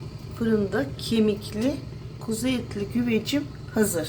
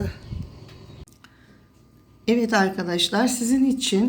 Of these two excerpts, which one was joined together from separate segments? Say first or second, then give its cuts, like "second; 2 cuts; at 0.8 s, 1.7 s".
second; 1 cut; at 1.1 s